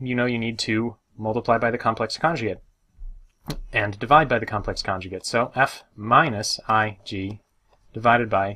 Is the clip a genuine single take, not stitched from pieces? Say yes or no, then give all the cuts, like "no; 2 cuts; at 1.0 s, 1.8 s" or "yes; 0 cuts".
yes; 0 cuts